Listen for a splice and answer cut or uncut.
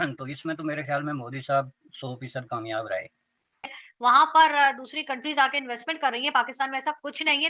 cut